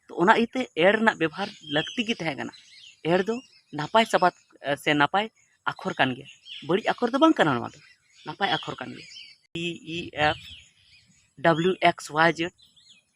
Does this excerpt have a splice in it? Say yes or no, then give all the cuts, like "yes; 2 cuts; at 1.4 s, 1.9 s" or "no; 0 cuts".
yes; 1 cut; at 9.5 s